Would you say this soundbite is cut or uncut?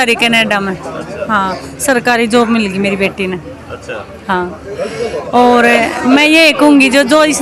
uncut